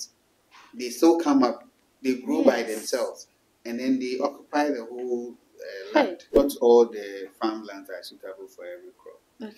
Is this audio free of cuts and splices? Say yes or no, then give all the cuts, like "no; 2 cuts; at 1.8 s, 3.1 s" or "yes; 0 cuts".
no; 1 cut; at 6.3 s